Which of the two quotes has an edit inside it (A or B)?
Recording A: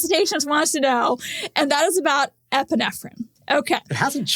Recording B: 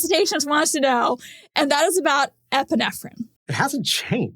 B